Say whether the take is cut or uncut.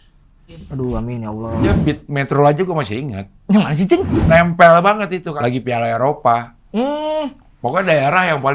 cut